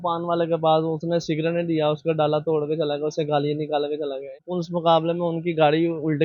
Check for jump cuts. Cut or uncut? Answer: cut